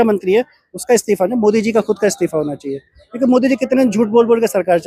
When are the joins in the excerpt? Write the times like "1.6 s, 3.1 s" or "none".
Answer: none